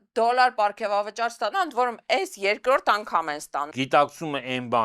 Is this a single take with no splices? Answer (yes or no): no